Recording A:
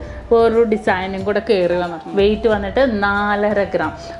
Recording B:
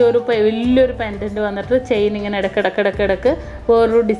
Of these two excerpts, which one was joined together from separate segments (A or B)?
A